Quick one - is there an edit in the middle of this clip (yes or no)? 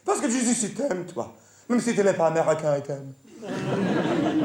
no